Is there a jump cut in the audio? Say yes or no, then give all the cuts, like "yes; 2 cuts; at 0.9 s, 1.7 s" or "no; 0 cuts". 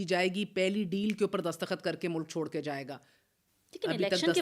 no; 0 cuts